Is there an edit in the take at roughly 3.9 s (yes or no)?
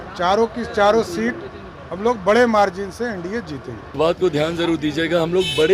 yes